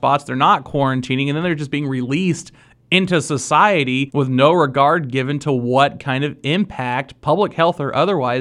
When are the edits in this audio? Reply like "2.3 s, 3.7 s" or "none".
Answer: 4.1 s